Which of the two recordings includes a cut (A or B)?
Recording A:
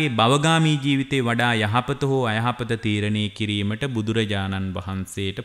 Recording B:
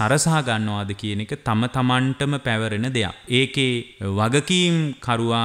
B